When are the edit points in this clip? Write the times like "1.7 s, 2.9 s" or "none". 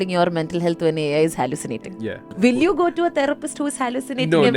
2.3 s